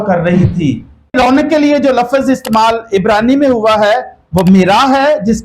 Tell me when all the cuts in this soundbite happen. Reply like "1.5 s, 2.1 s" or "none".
1.1 s